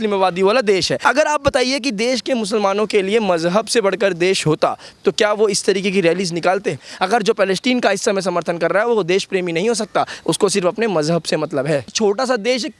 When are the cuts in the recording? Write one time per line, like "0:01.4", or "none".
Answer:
0:00.9
0:06.9
0:11.9